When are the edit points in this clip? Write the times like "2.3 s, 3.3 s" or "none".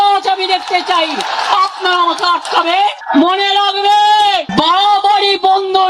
3.0 s, 4.5 s